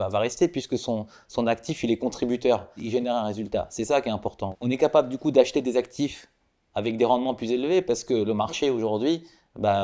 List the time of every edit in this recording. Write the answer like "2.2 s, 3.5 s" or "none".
2.8 s, 4.4 s